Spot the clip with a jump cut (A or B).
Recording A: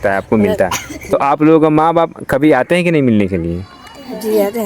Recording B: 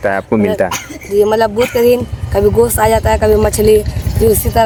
A